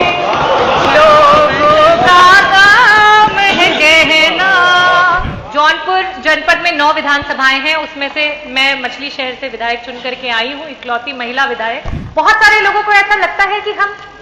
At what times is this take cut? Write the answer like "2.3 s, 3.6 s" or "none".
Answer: 5.3 s, 12.0 s